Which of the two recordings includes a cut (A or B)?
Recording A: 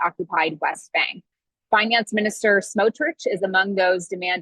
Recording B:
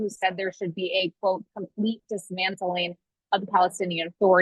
A